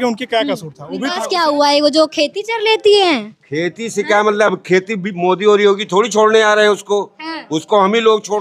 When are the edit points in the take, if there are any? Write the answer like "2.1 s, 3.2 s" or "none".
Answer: 1.0 s